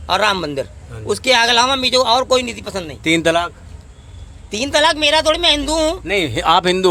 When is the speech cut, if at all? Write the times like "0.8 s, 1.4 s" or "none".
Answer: none